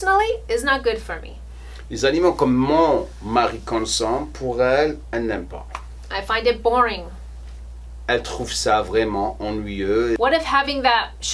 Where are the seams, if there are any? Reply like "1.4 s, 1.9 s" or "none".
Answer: 10.2 s